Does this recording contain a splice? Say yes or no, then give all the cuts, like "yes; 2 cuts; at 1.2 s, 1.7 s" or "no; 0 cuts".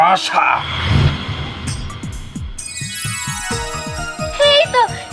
no; 0 cuts